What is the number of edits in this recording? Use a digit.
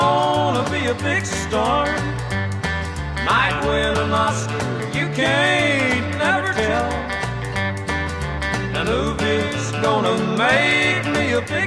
0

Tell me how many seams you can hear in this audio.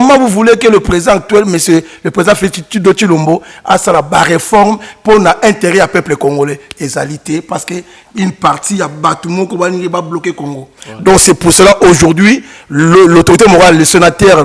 0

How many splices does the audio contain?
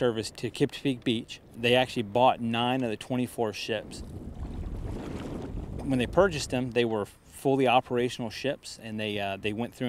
1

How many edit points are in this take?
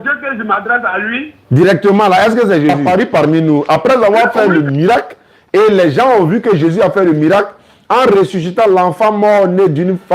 1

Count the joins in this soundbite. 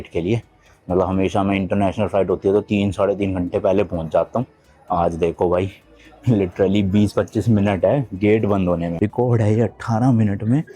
1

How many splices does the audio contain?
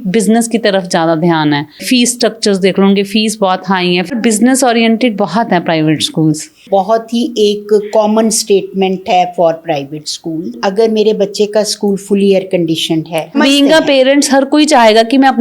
5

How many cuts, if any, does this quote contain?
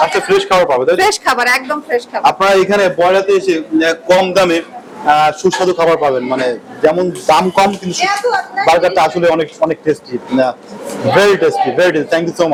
0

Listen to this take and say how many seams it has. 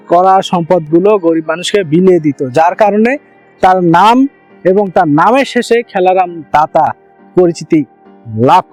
0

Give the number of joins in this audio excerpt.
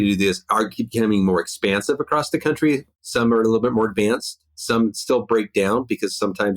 1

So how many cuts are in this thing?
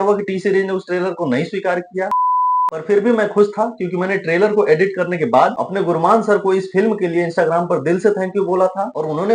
2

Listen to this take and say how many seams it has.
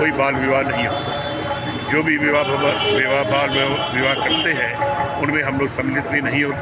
0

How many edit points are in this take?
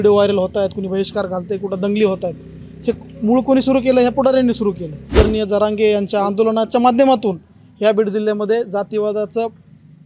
1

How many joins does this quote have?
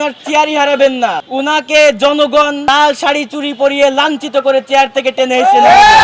2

